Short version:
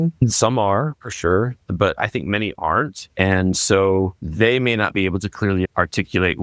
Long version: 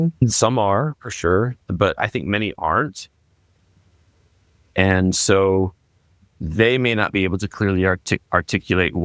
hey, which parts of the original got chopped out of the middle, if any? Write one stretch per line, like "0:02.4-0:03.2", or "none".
0:03.0-0:04.6
0:05.8-0:06.4
0:07.8-0:08.2